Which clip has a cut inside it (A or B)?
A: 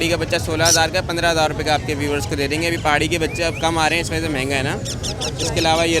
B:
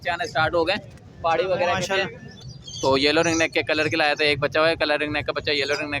B